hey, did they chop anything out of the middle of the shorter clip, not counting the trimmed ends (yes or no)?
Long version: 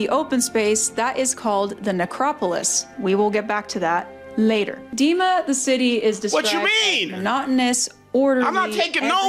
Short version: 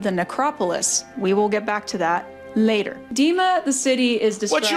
no